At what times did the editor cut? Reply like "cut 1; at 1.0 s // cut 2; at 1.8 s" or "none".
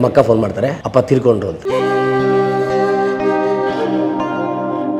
cut 1; at 0.8 s // cut 2; at 1.5 s